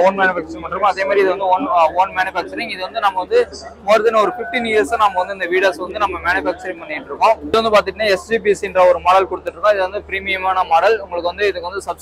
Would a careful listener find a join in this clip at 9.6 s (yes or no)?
no